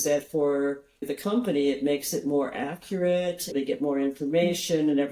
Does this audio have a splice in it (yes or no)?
yes